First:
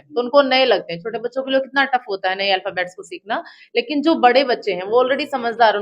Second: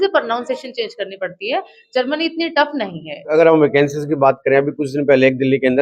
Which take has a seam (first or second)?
second